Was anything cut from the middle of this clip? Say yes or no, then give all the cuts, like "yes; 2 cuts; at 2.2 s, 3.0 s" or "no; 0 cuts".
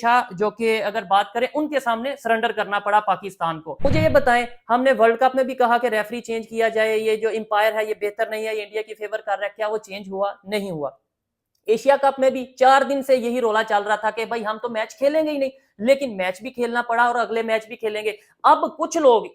yes; 1 cut; at 3.8 s